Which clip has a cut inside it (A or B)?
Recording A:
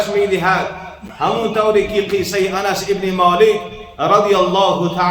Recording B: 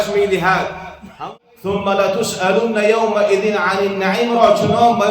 B